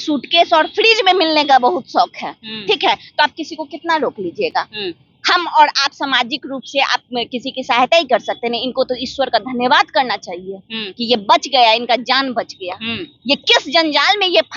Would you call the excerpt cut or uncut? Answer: uncut